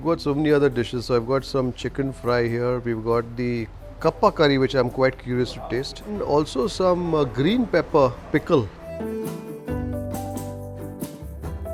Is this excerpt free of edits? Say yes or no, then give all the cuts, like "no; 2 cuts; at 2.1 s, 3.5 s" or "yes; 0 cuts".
yes; 0 cuts